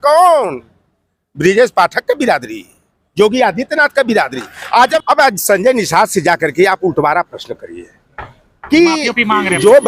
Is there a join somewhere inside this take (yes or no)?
yes